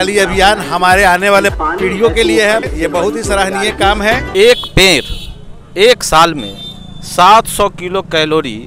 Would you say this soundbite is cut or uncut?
cut